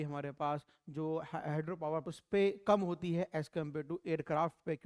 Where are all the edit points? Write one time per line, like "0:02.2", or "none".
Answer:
0:02.0

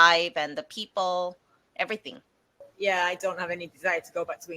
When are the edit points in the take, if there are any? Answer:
0:02.7

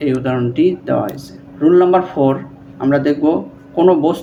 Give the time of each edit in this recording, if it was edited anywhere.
none

